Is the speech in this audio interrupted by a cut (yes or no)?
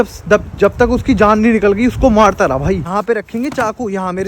yes